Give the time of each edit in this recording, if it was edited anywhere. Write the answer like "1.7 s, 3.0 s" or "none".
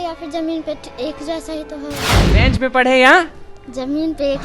2.1 s